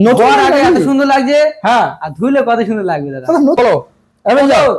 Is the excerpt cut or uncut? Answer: cut